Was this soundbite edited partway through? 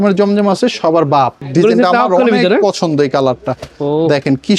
yes; 1 cut; at 1.4 s

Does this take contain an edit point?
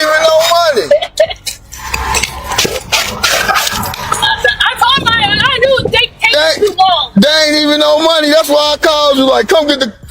no; 0 cuts

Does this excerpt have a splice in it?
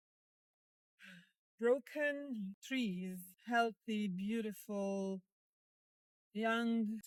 no; 0 cuts

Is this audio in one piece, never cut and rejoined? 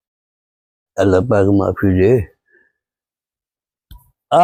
yes; 0 cuts

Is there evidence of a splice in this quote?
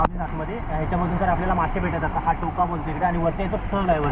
no; 0 cuts

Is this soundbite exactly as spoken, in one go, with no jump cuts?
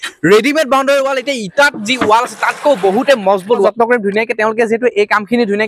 no; 1 cut; at 3.4 s

